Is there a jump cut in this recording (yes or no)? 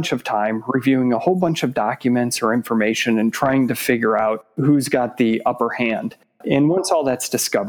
no